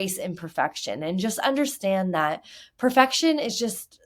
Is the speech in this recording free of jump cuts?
yes; 0 cuts

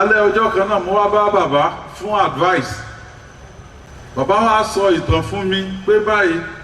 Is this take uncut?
no; 1 cut; at 3.9 s

